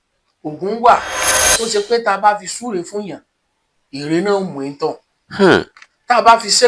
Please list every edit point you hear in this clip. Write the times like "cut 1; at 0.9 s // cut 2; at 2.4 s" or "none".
cut 1; at 1.3 s